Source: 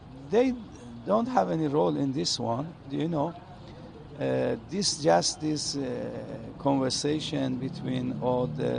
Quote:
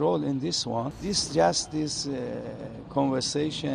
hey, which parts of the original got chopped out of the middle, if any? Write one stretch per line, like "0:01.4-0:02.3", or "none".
0:02.7-0:04.7